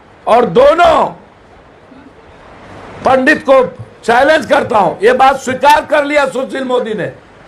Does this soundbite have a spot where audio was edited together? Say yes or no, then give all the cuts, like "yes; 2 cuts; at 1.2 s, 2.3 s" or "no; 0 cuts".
no; 0 cuts